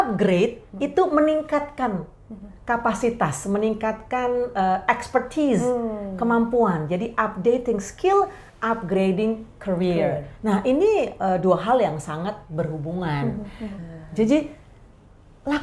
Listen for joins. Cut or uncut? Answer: cut